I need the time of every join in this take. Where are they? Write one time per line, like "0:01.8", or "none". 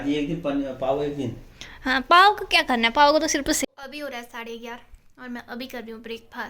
0:03.6